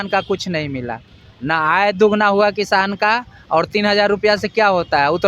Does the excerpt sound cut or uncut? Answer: uncut